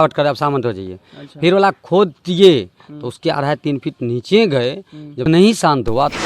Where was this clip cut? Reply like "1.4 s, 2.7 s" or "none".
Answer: 5.2 s